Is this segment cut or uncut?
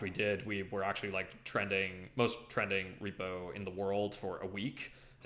uncut